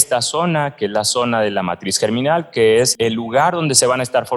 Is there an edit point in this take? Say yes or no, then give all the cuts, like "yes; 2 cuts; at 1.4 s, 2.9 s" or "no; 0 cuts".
yes; 1 cut; at 3.0 s